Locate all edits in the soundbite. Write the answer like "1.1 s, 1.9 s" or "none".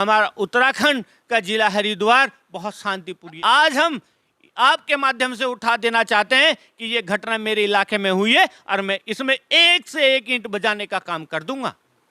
3.4 s